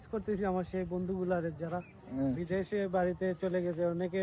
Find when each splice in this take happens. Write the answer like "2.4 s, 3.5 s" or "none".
none